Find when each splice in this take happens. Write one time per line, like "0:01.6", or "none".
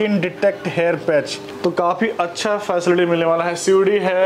0:01.4

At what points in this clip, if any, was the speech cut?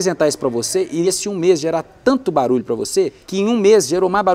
0:01.1
0:03.2

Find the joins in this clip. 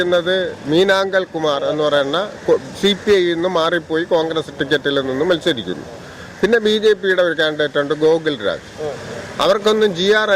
none

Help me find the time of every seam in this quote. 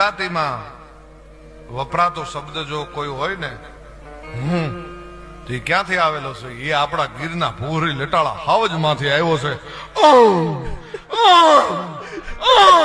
none

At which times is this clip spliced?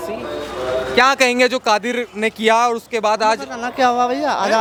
none

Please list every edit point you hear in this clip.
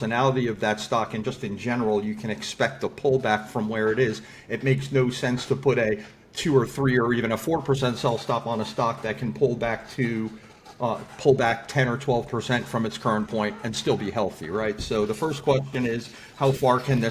none

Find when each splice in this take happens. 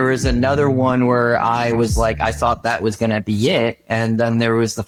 none

